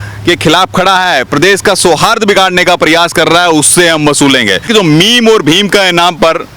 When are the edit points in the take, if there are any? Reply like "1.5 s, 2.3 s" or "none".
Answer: 4.7 s